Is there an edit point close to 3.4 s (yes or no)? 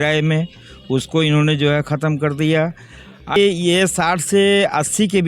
yes